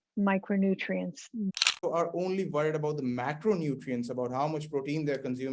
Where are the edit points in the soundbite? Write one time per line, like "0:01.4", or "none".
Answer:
0:01.5